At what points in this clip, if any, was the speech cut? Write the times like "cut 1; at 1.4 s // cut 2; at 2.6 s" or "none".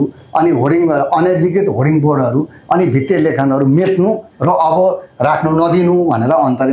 none